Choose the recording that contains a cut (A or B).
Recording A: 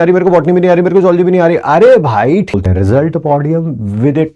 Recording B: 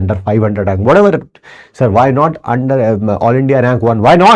A